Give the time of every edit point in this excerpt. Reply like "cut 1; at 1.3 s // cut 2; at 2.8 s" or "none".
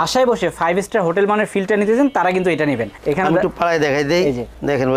none